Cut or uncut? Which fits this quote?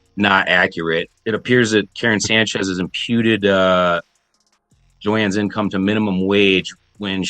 cut